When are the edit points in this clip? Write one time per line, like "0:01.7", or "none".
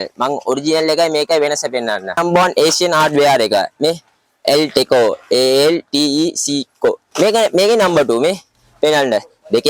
0:02.1
0:07.0